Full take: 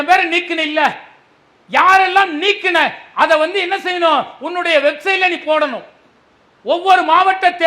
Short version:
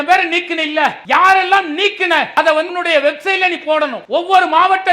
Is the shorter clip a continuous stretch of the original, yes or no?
no